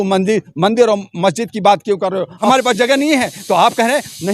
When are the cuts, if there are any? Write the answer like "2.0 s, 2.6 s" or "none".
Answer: 2.4 s

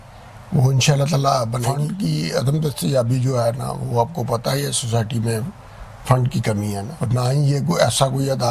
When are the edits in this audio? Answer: 1.8 s, 6.9 s

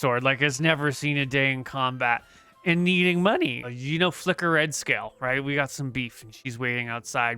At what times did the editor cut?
3.6 s

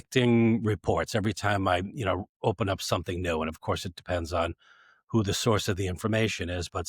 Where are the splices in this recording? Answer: none

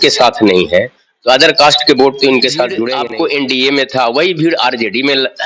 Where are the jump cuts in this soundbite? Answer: 2.9 s

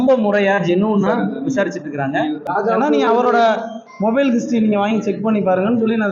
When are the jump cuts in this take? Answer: 2.5 s

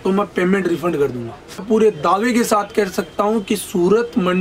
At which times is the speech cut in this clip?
1.6 s

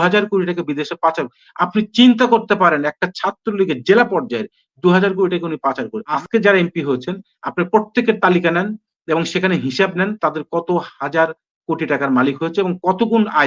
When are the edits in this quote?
6.1 s

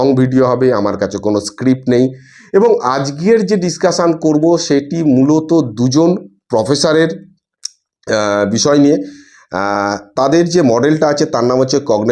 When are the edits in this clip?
none

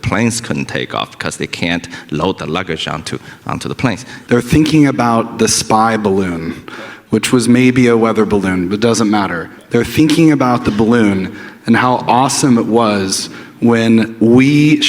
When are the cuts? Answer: 4.1 s

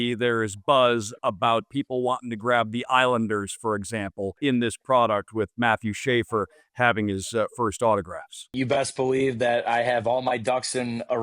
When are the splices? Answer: 1.7 s, 4.3 s, 8.5 s

